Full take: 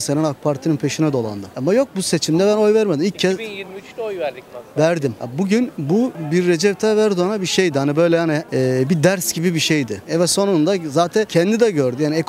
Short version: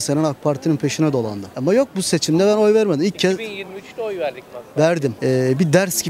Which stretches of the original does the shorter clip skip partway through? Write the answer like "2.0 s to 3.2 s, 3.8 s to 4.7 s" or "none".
5.2 s to 8.5 s